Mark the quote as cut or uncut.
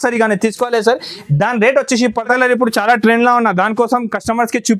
cut